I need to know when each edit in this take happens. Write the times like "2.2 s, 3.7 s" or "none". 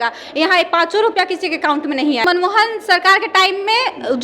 2.2 s